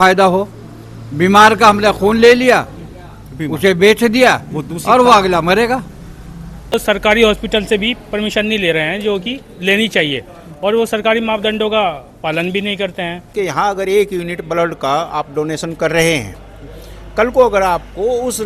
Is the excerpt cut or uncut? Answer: cut